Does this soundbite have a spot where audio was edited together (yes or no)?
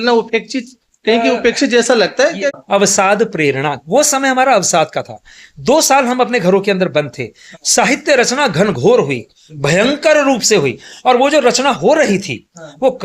yes